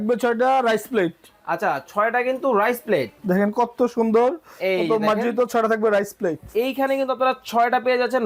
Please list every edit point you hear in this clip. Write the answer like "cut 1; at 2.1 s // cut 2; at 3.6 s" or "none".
none